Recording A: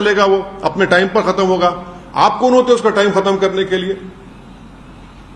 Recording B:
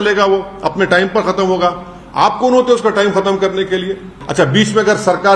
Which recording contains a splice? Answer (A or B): B